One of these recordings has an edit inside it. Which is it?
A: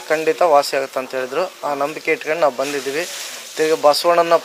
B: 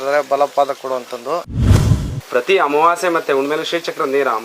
B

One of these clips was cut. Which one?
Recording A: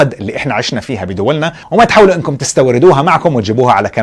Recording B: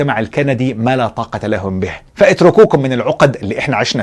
B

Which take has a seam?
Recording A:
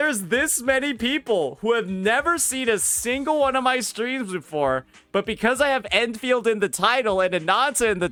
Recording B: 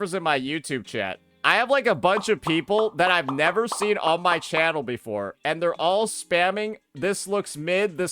B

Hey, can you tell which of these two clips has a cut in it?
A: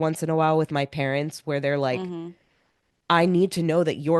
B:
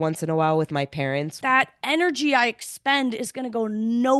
B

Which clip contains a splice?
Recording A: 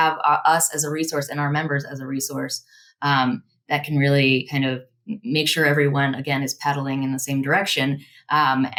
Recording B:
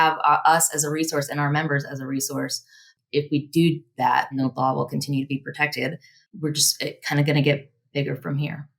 B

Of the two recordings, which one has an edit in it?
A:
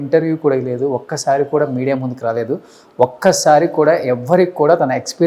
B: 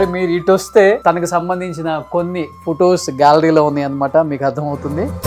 B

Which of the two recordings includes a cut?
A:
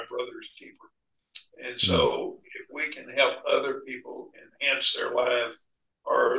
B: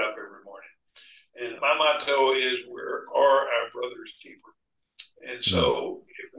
B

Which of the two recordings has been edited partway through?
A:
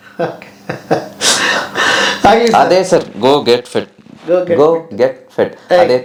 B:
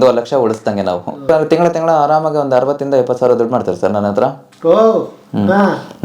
B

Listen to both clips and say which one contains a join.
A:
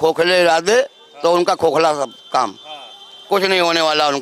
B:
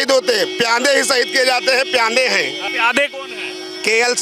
B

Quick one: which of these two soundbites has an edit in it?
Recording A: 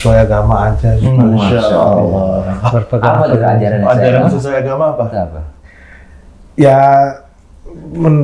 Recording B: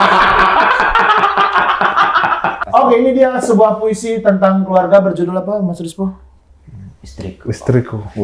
B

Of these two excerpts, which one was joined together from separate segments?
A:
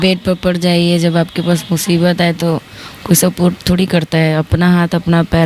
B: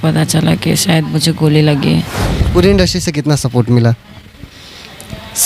B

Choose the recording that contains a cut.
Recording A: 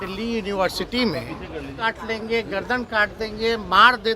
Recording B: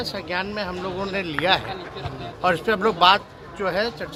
A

